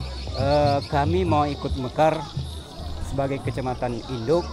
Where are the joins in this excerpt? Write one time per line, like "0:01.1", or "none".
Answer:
none